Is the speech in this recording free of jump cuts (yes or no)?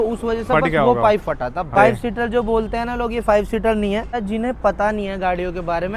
no